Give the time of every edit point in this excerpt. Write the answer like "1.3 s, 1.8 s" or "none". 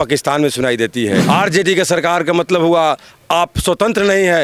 1.2 s